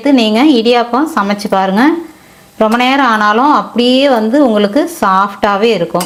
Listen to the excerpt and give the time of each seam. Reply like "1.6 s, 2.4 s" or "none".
none

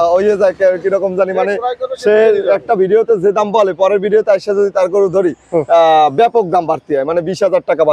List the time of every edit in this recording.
none

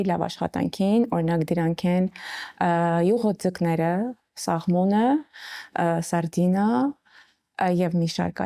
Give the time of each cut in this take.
none

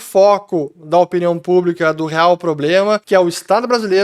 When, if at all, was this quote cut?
3.0 s

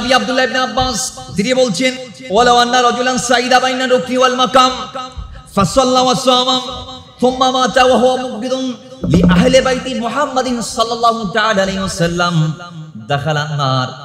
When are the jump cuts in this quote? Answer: 1.1 s, 2.1 s

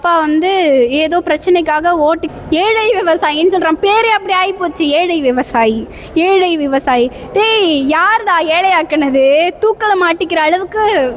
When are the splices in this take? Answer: 2.3 s

